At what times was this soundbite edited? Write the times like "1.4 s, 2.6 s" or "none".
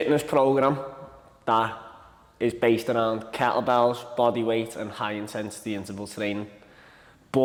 none